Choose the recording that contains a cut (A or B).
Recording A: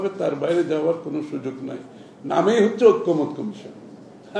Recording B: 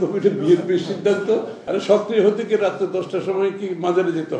B